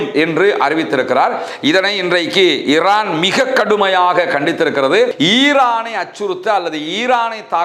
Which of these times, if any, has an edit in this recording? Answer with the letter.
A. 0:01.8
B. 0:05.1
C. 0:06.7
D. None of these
B